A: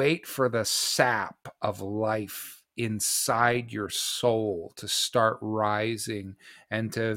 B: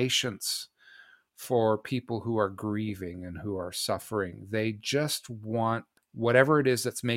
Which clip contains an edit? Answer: B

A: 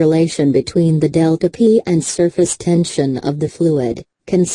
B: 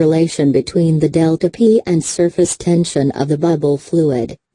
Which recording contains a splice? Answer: A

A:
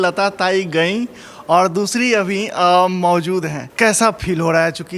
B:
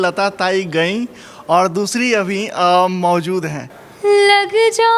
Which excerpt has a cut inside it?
B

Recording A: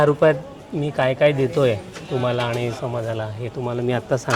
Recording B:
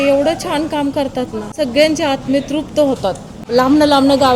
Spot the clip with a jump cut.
B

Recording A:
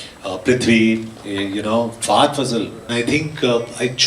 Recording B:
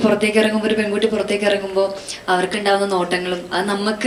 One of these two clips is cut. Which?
A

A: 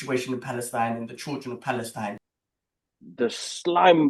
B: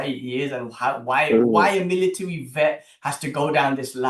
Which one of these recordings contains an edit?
A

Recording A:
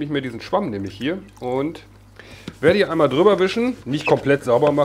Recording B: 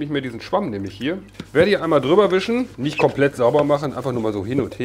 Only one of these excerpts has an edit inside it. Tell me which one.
B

